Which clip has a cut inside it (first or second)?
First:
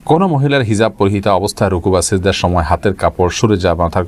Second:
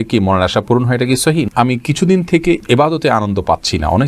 second